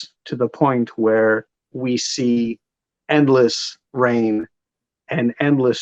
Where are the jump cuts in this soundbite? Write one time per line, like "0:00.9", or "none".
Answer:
0:01.6